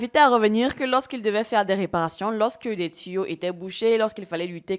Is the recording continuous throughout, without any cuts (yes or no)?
yes